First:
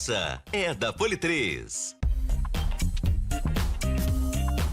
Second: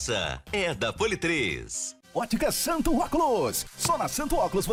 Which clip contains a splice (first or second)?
first